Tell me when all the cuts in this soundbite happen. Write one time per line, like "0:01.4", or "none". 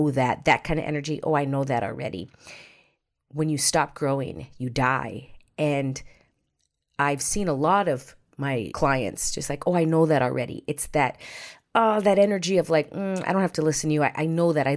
0:08.7